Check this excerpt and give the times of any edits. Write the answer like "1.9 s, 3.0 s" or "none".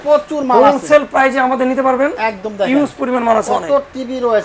none